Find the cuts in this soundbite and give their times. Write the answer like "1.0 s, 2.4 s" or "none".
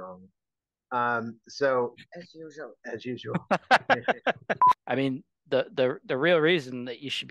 4.7 s